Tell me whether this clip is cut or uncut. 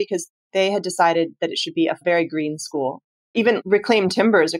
cut